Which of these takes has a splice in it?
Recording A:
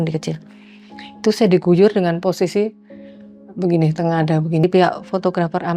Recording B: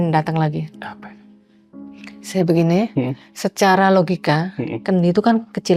A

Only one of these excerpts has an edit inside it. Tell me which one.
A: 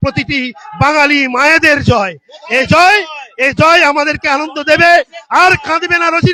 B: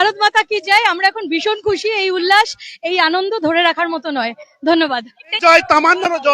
B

